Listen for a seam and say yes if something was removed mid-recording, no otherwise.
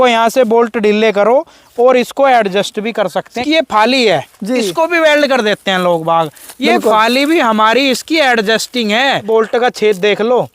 yes